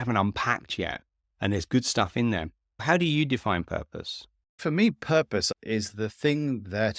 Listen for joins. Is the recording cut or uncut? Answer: cut